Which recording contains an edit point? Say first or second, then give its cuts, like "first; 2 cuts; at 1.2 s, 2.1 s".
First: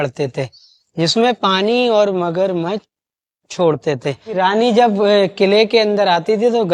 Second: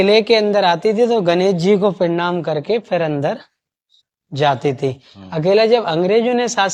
first; 1 cut; at 4.4 s